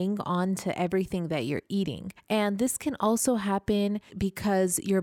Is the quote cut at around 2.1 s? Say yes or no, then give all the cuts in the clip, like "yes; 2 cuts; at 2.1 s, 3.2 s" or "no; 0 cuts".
yes; 2 cuts; at 2.1 s, 4.1 s